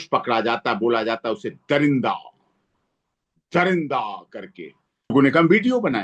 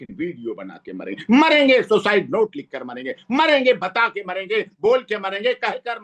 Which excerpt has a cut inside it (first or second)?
first